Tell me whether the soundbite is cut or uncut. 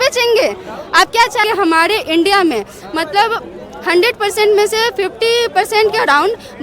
cut